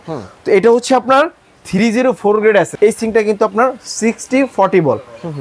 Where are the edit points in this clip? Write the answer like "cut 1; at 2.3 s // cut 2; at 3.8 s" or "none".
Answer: cut 1; at 2.7 s